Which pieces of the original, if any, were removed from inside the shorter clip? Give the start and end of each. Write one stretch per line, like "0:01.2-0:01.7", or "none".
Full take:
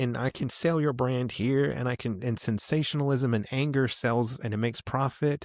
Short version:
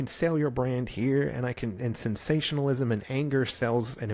none

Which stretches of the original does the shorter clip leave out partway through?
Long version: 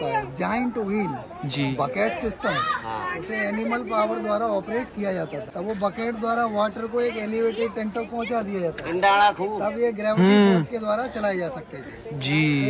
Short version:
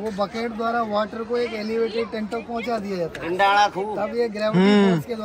none

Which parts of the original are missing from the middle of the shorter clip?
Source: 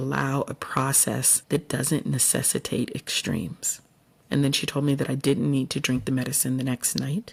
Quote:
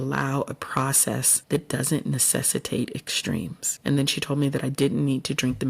0:03.6-0:04.1

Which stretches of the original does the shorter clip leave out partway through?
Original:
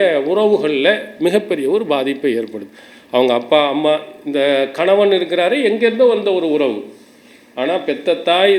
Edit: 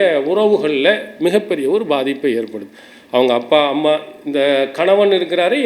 none

